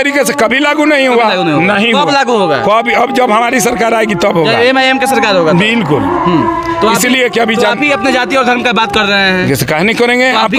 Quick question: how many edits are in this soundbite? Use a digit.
0